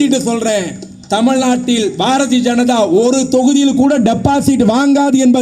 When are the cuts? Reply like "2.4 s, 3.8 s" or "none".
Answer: none